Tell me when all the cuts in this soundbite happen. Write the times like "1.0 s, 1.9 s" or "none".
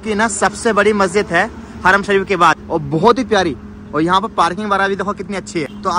none